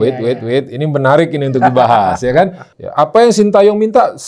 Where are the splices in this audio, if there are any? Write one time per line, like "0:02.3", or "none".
0:02.6